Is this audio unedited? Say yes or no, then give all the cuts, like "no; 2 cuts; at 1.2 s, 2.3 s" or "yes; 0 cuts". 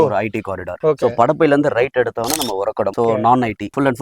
no; 1 cut; at 2.9 s